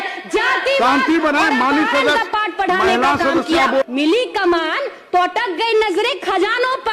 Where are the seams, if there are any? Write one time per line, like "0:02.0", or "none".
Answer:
0:03.8